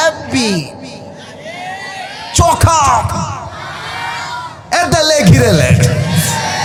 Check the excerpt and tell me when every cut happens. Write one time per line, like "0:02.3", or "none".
none